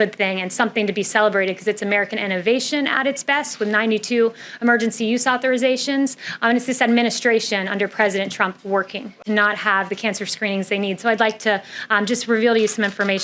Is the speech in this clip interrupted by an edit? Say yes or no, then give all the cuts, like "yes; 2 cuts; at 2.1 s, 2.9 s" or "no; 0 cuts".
yes; 1 cut; at 9.2 s